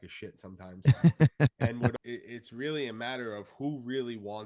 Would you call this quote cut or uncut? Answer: cut